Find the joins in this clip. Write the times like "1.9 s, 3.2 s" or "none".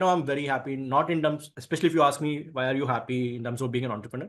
none